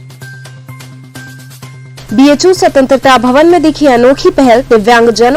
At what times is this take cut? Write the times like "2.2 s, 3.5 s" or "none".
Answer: 1.6 s